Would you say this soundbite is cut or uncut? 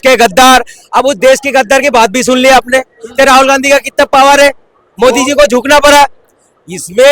uncut